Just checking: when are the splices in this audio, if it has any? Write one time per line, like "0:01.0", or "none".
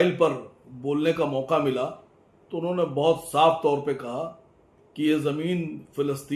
none